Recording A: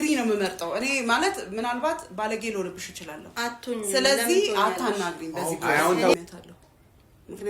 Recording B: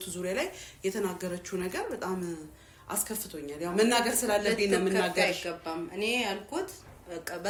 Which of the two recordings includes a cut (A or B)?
A